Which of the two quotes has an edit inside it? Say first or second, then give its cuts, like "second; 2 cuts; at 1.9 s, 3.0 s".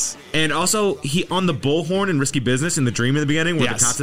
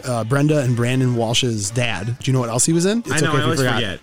second; 2 cuts; at 2.2 s, 3.1 s